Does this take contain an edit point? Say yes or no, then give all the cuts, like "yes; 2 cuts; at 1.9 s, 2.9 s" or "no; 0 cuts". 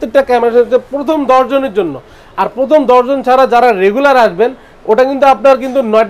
no; 0 cuts